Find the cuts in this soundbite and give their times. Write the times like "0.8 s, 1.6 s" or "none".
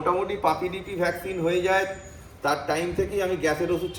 none